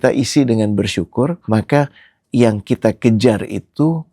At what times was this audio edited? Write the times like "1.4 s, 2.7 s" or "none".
1.4 s